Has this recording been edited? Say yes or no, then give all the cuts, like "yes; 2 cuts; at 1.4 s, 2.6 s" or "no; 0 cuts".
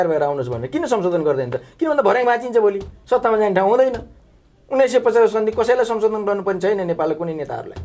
no; 0 cuts